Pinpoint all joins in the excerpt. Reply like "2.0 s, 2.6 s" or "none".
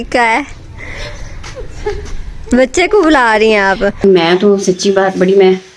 4.0 s